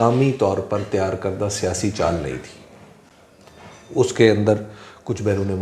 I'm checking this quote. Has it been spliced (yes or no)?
no